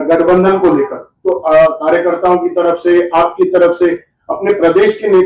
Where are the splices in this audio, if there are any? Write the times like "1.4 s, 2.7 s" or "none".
none